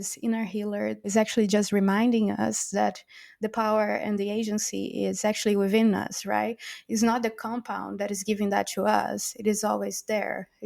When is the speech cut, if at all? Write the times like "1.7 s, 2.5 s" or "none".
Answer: 1.1 s